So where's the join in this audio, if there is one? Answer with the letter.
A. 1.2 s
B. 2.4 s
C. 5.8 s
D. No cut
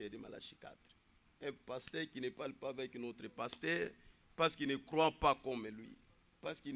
D